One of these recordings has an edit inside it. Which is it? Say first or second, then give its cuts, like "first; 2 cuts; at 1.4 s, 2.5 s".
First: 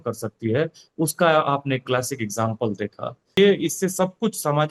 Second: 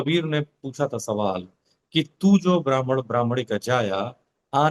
first; 1 cut; at 3.4 s